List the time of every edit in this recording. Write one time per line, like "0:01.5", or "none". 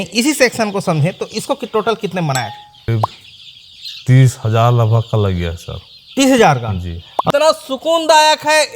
0:02.9
0:07.3